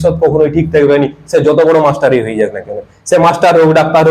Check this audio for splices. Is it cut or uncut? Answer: uncut